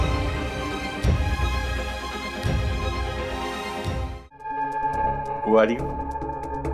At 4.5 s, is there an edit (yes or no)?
yes